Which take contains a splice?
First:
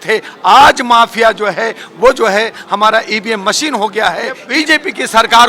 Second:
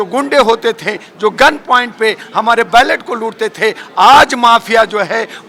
first; 1 cut; at 4.4 s

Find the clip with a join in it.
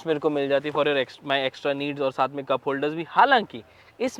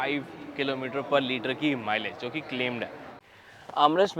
second; 1 cut; at 3.2 s

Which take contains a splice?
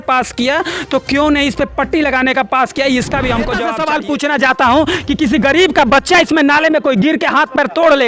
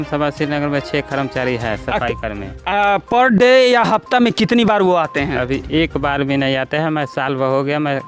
first; 1 cut; at 3.7 s

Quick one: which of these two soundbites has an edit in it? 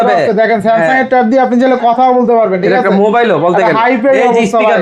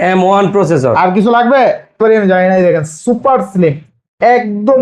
second; 1 cut; at 2.0 s

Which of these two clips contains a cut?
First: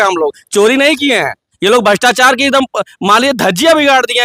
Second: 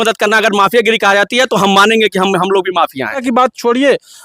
second; 1 cut; at 3.2 s

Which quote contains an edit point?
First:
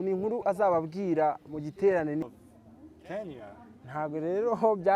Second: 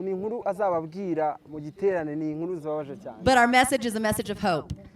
first; 1 cut; at 2.2 s

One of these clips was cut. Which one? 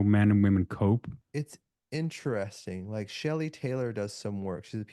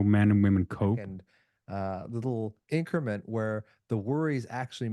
second; 1 cut; at 1.2 s

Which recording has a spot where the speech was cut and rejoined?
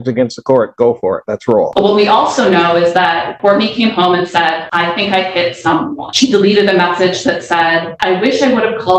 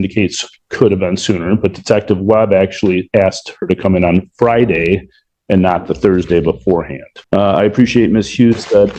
first; 5 cuts; at 1.7 s, 3.3 s, 4.6 s, 6.0 s, 7.9 s

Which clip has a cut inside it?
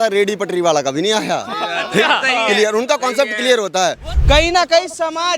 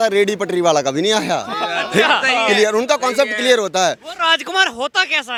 first; 1 cut; at 4.1 s

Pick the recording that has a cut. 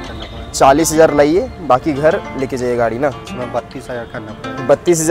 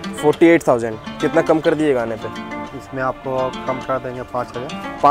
first; 1 cut; at 3.3 s

